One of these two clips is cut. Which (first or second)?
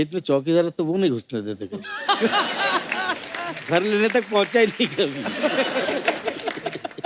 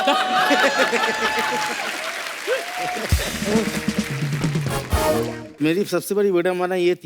second